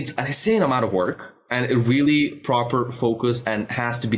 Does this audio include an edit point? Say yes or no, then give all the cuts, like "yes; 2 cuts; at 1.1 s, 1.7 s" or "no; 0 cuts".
no; 0 cuts